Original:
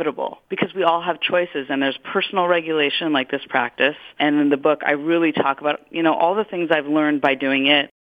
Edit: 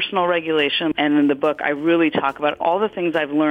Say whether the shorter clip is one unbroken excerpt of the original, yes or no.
no